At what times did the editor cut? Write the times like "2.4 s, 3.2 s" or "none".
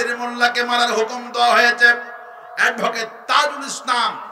none